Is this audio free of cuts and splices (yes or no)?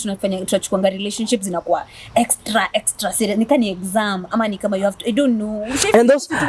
yes